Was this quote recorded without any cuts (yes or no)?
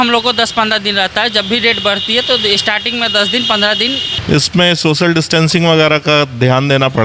no